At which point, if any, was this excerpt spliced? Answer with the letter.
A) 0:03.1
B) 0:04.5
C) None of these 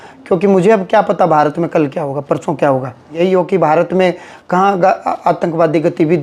A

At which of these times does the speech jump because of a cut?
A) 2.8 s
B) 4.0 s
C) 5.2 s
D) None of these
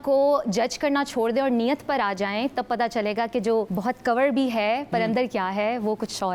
D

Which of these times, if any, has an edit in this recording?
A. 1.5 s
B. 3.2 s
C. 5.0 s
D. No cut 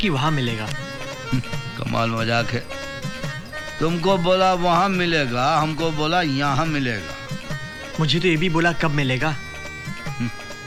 D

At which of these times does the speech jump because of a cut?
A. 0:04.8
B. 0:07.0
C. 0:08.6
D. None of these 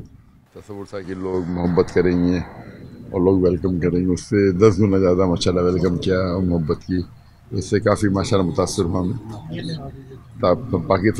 D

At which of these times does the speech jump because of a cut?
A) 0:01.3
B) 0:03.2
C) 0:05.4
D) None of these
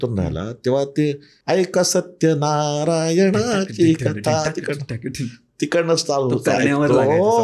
A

